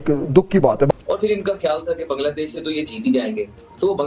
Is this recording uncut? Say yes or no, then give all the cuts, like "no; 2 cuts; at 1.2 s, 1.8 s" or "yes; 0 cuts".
no; 1 cut; at 1.0 s